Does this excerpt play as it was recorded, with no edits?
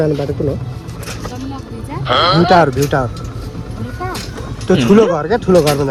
yes; 0 cuts

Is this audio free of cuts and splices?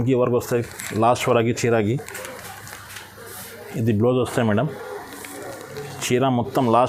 yes; 0 cuts

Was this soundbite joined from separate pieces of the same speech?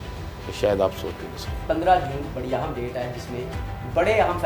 yes; 1 cut; at 1.6 s

